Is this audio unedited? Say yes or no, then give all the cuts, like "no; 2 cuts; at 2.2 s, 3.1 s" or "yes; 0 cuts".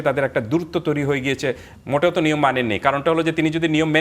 no; 1 cut; at 1.7 s